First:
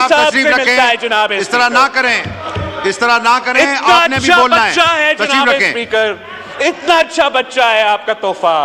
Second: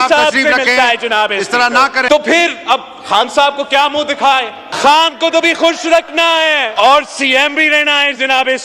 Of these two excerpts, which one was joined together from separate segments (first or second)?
second